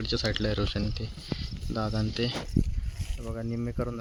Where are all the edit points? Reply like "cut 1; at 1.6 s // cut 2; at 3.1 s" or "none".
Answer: none